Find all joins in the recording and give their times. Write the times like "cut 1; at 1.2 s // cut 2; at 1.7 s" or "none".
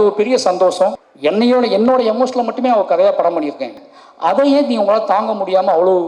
cut 1; at 1.1 s // cut 2; at 3.7 s